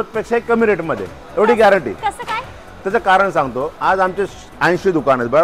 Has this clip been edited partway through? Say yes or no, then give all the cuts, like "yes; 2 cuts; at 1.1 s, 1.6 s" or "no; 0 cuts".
no; 0 cuts